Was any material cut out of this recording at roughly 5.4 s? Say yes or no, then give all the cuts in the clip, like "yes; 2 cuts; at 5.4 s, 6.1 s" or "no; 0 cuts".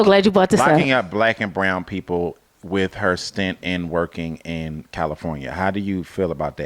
no; 0 cuts